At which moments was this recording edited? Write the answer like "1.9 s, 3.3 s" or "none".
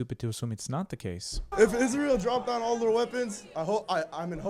1.4 s